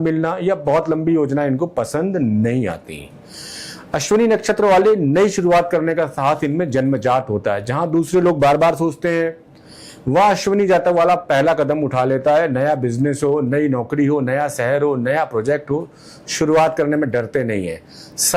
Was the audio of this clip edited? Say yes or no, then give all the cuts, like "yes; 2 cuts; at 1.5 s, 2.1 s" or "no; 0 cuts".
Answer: no; 0 cuts